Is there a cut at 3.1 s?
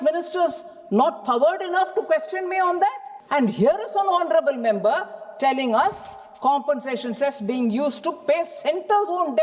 yes; 1 cut; at 3.1 s

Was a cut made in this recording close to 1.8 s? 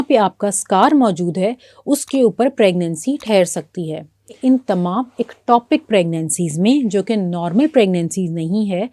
no; 1 cut; at 4.4 s

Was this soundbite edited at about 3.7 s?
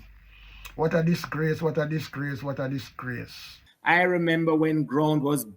yes; 1 cut; at 3.7 s

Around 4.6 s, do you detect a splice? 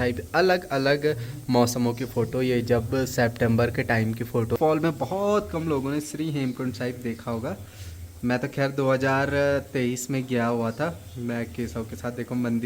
yes; 1 cut; at 4.6 s

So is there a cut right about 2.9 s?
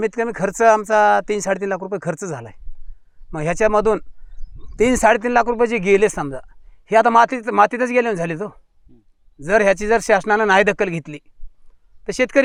no; 0 cuts

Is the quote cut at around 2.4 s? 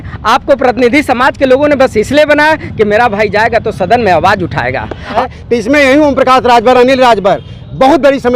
no; 1 cut; at 5.1 s

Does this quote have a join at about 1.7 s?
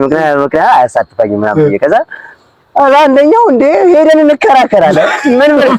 no; 0 cuts

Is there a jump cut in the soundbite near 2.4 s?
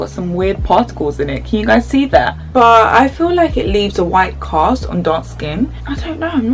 yes; 2 cuts; at 2.4 s, 5.7 s

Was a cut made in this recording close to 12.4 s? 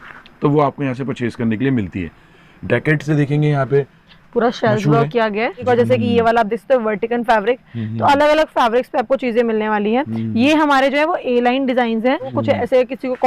yes; 2 cuts; at 5.6 s, 12.4 s

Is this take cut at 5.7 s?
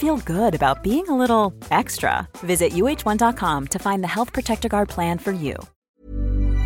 yes; 1 cut; at 5.7 s

